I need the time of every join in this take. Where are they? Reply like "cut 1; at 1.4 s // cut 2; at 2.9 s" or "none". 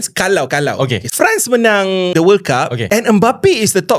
cut 1; at 1.0 s // cut 2; at 2.1 s // cut 3; at 2.8 s